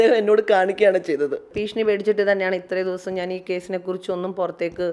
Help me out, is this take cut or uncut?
cut